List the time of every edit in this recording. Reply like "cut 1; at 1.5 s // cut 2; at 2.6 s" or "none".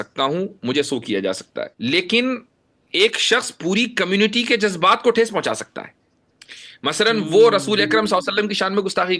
cut 1; at 1.7 s